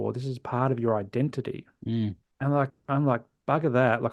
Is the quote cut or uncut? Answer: cut